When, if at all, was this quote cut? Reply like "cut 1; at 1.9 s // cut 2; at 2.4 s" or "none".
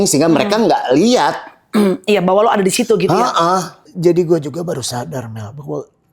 cut 1; at 3.8 s